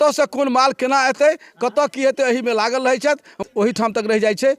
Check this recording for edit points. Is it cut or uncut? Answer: cut